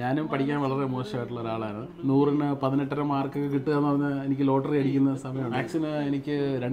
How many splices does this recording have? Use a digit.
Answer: 1